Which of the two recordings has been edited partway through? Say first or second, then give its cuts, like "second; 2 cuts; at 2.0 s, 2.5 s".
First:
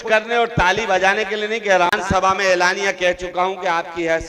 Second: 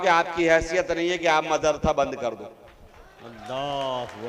first; 1 cut; at 2.0 s